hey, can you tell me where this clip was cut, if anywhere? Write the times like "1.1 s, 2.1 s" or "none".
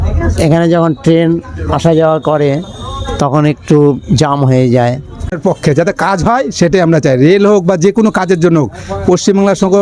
5.3 s